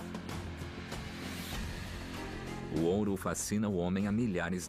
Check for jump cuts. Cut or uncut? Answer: cut